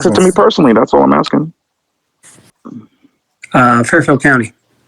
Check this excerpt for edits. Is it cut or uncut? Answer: cut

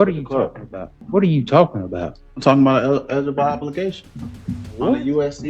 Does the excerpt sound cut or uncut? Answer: cut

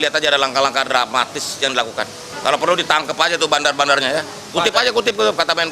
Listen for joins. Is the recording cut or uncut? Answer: cut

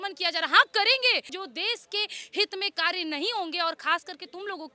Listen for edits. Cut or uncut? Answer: cut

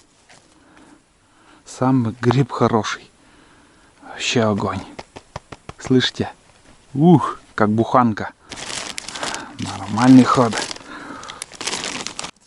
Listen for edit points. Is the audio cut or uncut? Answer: uncut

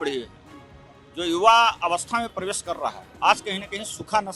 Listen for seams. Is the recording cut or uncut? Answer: uncut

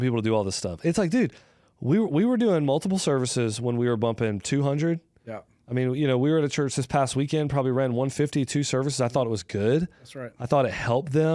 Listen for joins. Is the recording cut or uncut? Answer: uncut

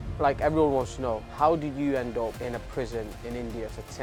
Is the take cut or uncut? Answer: cut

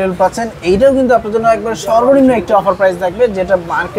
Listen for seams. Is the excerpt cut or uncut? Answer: uncut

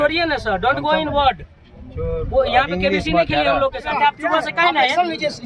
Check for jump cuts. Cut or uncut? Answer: cut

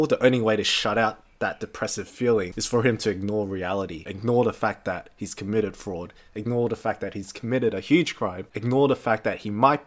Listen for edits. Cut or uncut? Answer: uncut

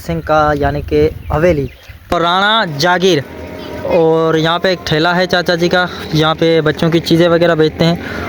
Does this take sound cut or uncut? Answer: cut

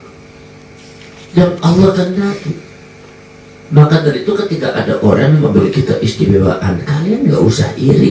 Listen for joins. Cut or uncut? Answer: uncut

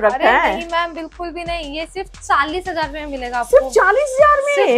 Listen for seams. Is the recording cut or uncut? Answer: uncut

